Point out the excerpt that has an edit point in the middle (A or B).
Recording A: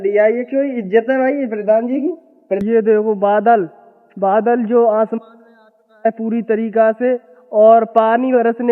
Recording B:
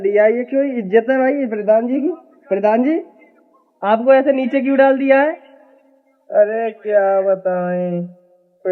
A